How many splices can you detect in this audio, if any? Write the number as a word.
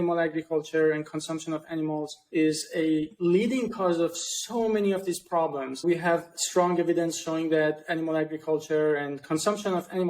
one